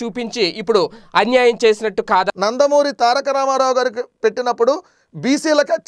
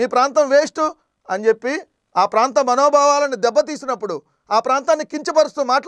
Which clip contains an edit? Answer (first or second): first